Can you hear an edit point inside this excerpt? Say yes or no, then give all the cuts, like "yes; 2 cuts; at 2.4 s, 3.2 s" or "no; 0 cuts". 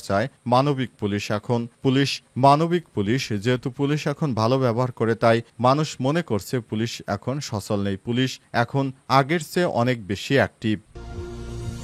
yes; 1 cut; at 10.9 s